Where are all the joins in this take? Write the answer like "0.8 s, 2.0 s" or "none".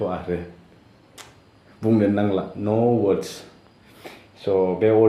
none